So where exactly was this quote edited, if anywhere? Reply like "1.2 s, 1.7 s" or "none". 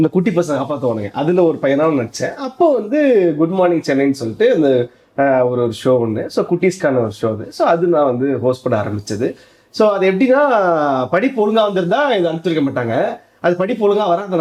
none